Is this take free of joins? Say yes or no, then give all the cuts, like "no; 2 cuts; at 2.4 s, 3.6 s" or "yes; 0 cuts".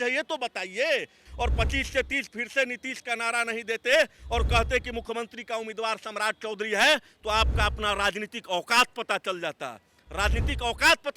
no; 1 cut; at 1.2 s